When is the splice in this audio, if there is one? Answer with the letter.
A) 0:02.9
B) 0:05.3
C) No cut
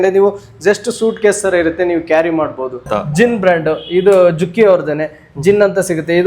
A